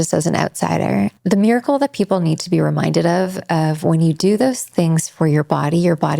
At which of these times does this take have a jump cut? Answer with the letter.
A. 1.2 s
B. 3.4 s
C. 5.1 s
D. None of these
A